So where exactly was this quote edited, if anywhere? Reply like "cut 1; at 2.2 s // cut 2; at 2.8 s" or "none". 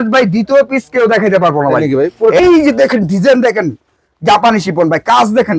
cut 1; at 2.4 s